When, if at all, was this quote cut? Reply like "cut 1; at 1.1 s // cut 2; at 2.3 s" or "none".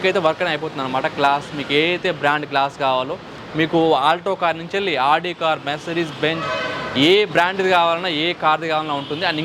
none